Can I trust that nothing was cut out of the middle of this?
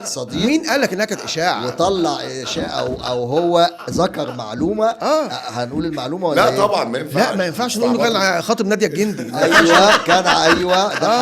yes; 0 cuts

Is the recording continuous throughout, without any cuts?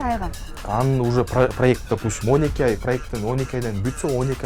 yes; 0 cuts

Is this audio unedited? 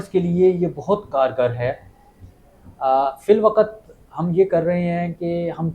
yes; 0 cuts

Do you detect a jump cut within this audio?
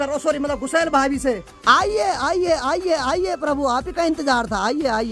no; 0 cuts

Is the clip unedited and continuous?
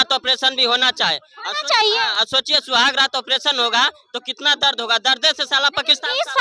yes; 0 cuts

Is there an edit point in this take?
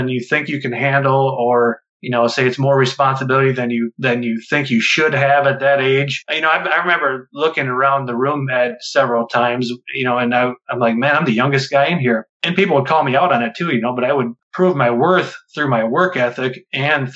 yes; 1 cut; at 14.4 s

